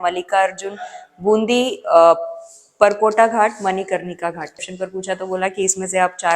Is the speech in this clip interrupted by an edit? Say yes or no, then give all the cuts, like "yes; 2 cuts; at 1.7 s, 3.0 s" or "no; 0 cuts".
yes; 1 cut; at 4.6 s